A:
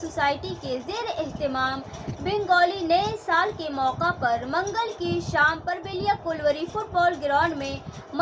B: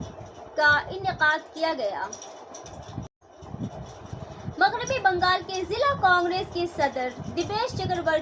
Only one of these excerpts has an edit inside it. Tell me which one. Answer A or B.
B